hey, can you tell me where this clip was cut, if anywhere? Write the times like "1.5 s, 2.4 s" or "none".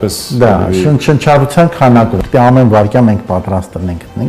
2.2 s